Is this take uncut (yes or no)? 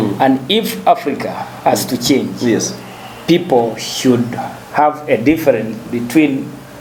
yes